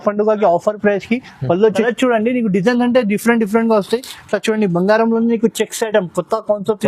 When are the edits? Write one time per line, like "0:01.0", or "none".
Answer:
0:01.8